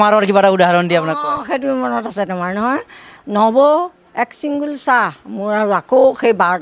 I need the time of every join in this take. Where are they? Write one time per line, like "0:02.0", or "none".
0:03.1